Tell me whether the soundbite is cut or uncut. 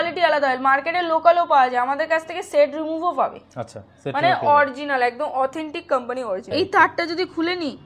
cut